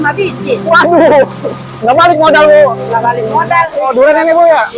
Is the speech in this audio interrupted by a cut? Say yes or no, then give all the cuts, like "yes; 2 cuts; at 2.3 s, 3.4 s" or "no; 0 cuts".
yes; 1 cut; at 3.7 s